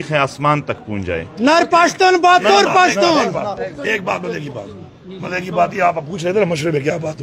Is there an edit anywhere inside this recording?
no; 0 cuts

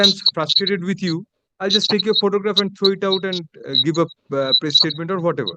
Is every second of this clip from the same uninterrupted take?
no; 1 cut; at 1.4 s

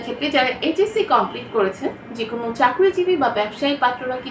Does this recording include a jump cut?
no; 0 cuts

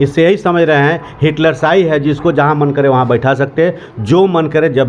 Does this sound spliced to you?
no; 0 cuts

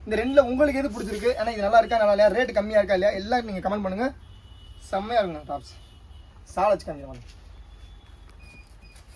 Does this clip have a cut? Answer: no; 0 cuts

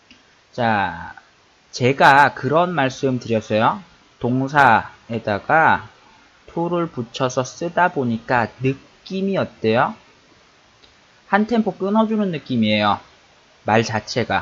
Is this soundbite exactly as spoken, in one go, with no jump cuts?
yes; 0 cuts

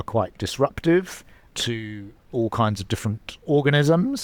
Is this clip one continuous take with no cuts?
no; 2 cuts; at 1.4 s, 3.3 s

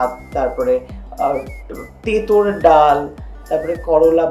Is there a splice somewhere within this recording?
no; 0 cuts

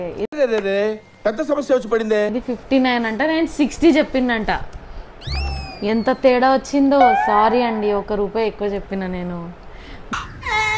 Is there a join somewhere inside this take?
no; 0 cuts

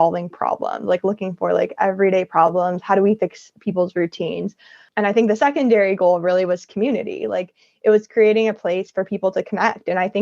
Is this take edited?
yes; 1 cut; at 4.8 s

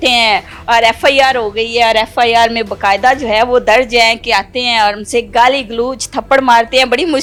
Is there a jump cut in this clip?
no; 0 cuts

